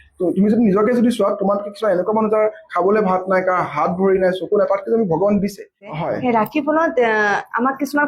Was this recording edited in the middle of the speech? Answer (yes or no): yes